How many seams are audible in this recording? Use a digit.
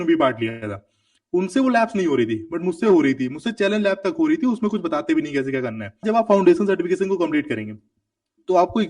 1